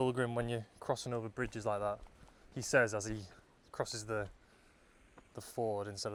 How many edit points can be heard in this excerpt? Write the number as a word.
zero